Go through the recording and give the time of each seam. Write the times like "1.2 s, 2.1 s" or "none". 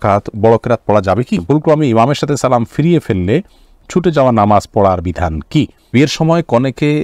1.4 s, 5.9 s